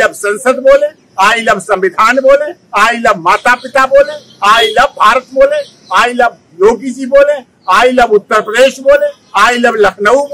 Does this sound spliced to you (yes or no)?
no